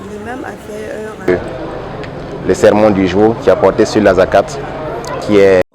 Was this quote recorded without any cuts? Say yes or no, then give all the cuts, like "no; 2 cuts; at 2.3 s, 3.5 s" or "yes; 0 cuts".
no; 1 cut; at 1.3 s